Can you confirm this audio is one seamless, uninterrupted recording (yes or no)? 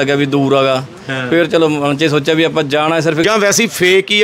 no